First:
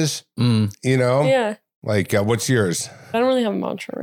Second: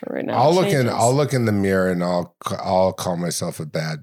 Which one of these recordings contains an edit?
first; 2 cuts; at 1.7 s, 2.9 s

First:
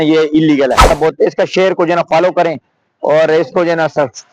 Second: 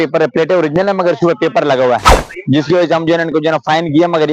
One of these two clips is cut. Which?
first; 1 cut; at 0.9 s

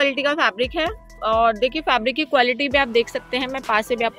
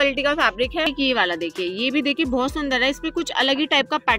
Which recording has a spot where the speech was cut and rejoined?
second; 1 cut; at 0.9 s

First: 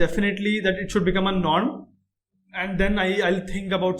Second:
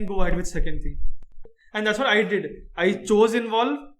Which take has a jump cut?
second; 1 cut; at 1.4 s

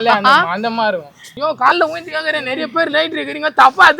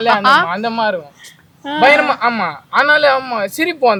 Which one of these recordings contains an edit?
first; 1 cut; at 1.3 s

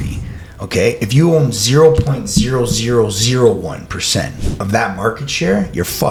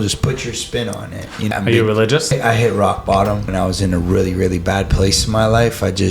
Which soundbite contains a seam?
second; 3 cuts; at 1.5 s, 2.3 s, 3.5 s

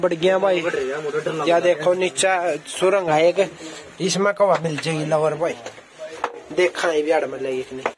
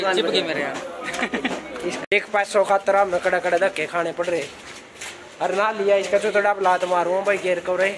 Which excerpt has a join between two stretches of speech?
second; 1 cut; at 2.0 s

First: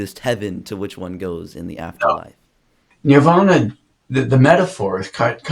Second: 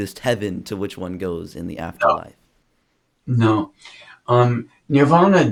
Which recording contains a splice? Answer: first; 1 cut; at 2.9 s

